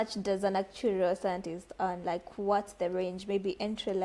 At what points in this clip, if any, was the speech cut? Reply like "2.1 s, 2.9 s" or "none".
none